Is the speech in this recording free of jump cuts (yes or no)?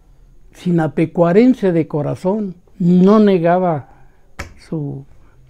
yes